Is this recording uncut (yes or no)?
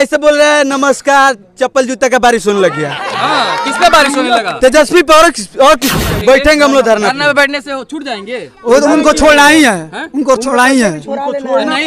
no